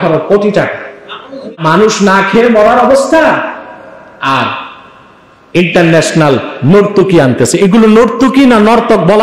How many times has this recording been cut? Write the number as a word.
one